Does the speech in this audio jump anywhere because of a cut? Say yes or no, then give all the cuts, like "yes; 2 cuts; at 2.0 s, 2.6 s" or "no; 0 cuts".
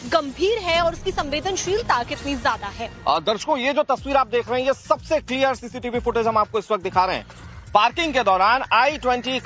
yes; 1 cut; at 3.7 s